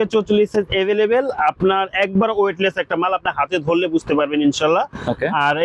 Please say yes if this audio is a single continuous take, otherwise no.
yes